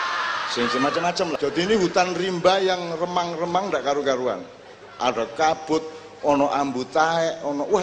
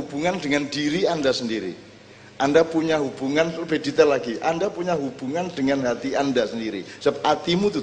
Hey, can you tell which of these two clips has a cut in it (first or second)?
first